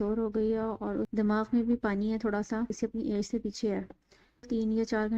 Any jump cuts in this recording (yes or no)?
yes